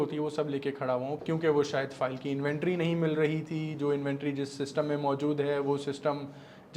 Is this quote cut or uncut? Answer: cut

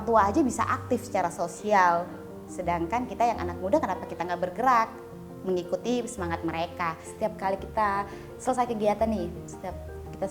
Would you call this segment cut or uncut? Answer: cut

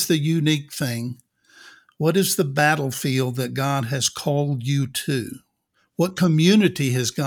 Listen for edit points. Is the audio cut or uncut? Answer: uncut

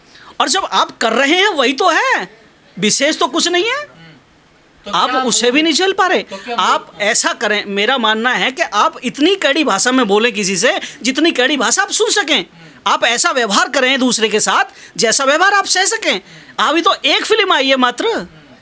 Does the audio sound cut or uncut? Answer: uncut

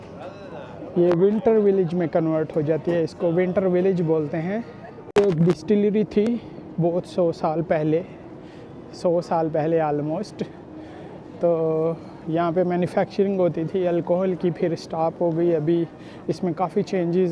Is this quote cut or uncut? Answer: cut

